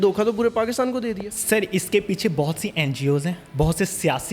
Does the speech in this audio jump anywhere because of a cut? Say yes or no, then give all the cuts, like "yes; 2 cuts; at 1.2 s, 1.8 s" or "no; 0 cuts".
yes; 1 cut; at 1.3 s